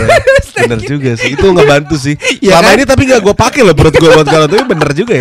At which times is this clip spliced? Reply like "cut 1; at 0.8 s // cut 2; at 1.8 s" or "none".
none

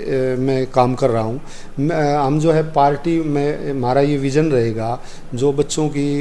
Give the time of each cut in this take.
none

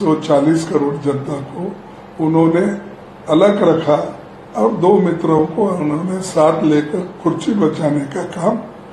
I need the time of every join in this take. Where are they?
none

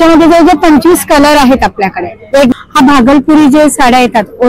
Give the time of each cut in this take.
cut 1; at 2.5 s

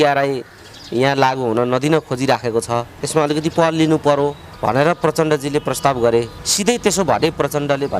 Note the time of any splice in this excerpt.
cut 1; at 3.0 s // cut 2; at 4.5 s // cut 3; at 6.4 s

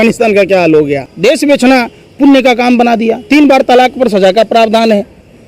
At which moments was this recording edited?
cut 1; at 1.1 s

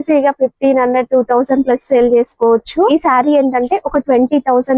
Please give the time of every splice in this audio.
cut 1; at 2.9 s

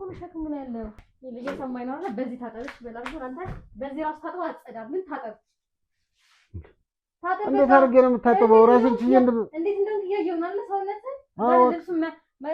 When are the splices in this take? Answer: cut 1; at 1.1 s

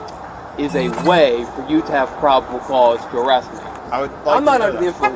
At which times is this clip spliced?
cut 1; at 3.8 s

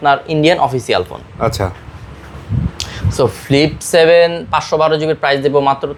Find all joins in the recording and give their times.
none

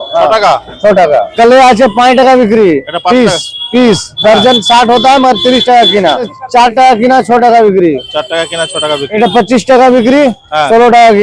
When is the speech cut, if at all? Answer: cut 1; at 1.3 s // cut 2; at 6.4 s // cut 3; at 9.2 s

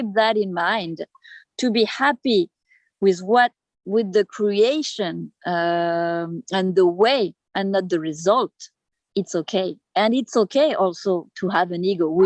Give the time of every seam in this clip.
none

